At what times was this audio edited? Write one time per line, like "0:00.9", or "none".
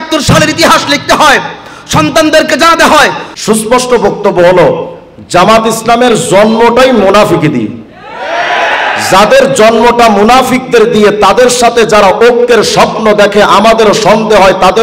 0:03.3